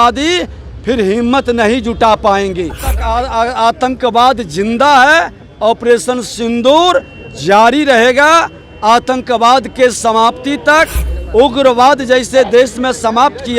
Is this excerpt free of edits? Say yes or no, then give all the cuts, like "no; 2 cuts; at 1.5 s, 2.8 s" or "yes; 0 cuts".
no; 1 cut; at 3.0 s